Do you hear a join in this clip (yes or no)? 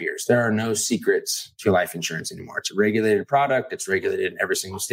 no